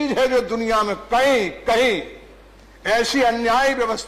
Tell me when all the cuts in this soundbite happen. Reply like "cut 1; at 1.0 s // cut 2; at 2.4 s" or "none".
none